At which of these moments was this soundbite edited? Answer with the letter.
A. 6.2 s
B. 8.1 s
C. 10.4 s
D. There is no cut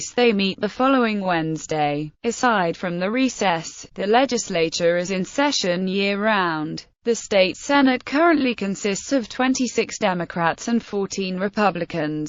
B